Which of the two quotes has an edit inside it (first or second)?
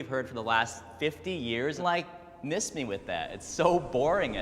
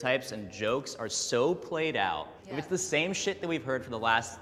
first